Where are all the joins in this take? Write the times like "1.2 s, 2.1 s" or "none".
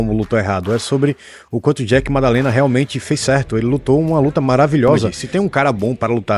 5.2 s